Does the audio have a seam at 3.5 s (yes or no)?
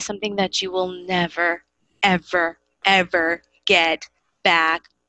no